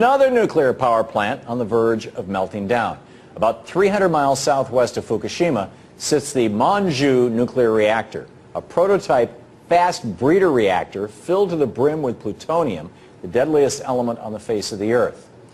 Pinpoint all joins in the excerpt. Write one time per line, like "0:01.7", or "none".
0:09.0